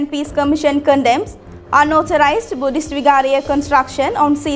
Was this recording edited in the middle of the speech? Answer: no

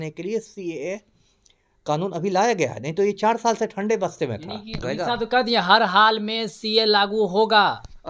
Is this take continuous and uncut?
no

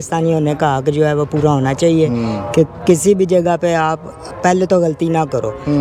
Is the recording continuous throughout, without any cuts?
yes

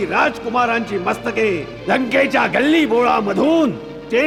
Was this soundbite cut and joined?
no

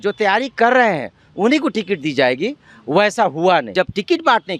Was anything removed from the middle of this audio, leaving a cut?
yes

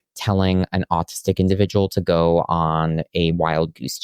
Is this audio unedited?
yes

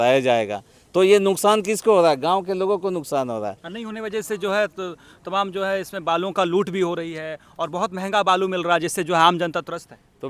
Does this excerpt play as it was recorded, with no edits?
yes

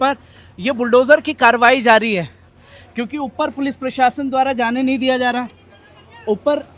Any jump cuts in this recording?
no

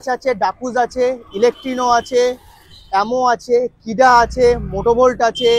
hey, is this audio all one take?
yes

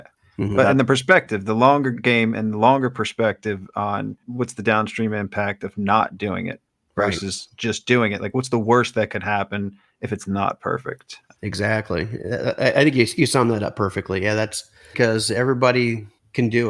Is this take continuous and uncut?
no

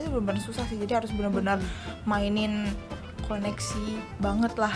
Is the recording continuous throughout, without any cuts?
yes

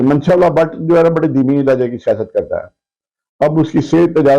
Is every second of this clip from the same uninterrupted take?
yes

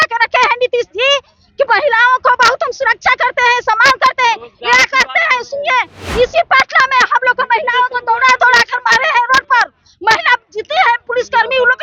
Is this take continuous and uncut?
yes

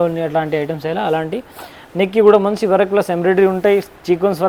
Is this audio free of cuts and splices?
yes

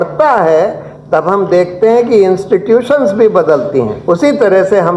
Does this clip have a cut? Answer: yes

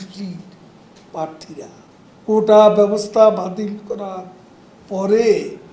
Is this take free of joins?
no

